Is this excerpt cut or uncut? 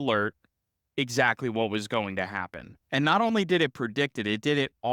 cut